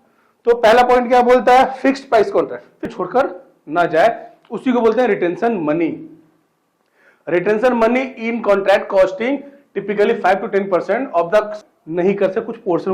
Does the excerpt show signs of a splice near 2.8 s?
yes; 2 cuts; at 2.8 s, 11.5 s

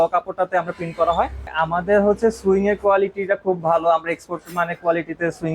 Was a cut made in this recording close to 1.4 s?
yes; 1 cut; at 1.4 s

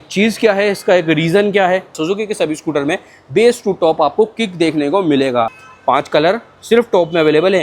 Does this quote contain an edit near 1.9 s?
yes; 2 cuts; at 1.9 s, 5.6 s

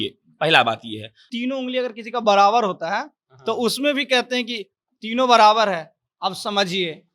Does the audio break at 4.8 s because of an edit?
no; 1 cut; at 1.2 s

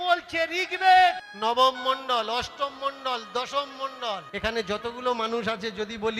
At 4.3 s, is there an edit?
yes; 2 cuts; at 1.3 s, 4.3 s

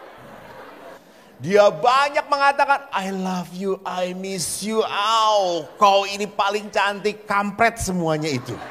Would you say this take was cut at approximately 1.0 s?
yes; 1 cut; at 1.0 s

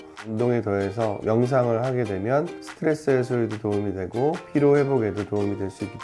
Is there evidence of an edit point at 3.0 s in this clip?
no; 2 cuts; at 1.2 s, 4.4 s

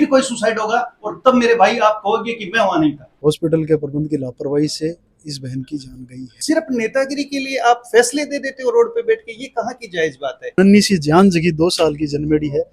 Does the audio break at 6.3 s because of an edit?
yes; 3 cuts; at 3.1 s, 6.3 s, 10.5 s

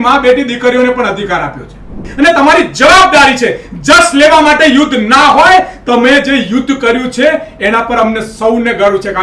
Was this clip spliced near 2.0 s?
yes; 1 cut; at 2.0 s

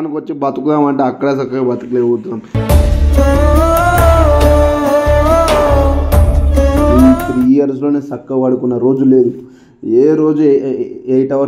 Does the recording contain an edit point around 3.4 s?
no; 1 cut; at 6.9 s

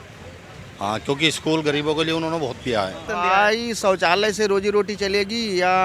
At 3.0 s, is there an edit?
yes; 1 cut; at 3.0 s

